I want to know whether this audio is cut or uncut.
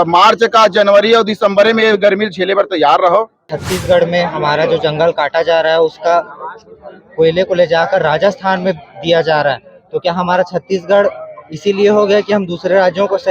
cut